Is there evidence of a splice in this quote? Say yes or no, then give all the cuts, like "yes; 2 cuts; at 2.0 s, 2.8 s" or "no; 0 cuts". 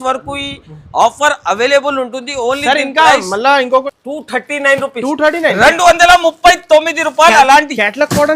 yes; 1 cut; at 3.9 s